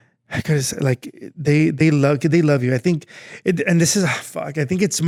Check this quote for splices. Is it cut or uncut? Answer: uncut